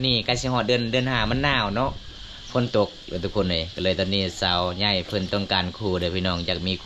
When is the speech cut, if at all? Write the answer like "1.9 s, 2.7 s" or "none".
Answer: none